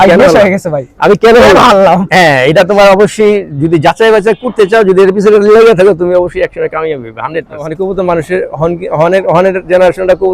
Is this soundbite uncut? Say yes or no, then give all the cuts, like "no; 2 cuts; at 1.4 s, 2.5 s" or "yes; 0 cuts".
no; 1 cut; at 7.7 s